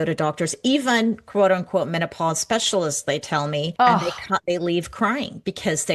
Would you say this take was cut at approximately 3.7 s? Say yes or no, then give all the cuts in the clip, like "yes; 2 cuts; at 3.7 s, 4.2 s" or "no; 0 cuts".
yes; 1 cut; at 3.7 s